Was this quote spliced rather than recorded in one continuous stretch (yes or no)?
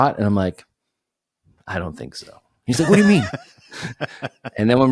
no